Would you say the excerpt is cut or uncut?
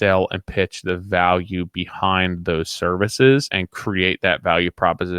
uncut